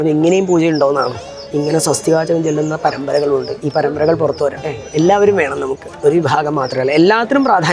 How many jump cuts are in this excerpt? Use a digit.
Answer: 2